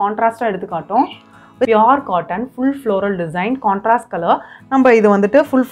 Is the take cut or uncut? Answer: cut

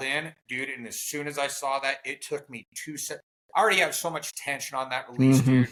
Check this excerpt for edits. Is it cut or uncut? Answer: uncut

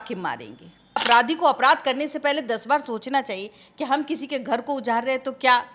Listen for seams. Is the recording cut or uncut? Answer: cut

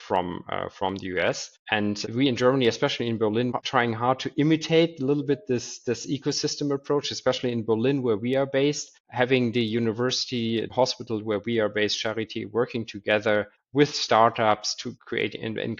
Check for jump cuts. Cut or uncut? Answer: cut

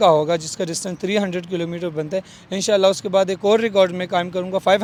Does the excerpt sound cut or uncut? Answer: uncut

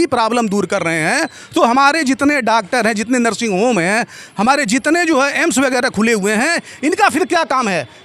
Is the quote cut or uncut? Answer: uncut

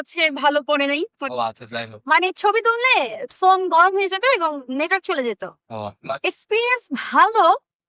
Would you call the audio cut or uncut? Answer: cut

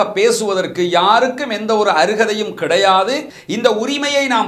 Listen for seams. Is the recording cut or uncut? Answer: cut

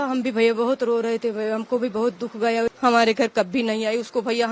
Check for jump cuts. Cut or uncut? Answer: cut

